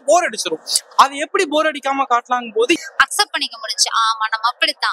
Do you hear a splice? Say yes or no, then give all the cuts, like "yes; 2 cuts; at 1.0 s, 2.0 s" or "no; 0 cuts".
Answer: yes; 1 cut; at 2.8 s